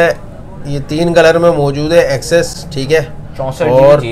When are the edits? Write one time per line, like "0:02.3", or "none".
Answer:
none